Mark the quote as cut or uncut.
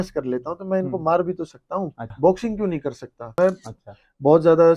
cut